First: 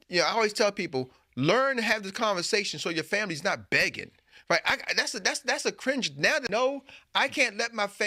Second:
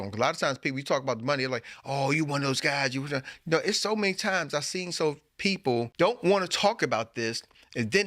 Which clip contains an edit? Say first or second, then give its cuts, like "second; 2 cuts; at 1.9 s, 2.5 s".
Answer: second; 1 cut; at 5.9 s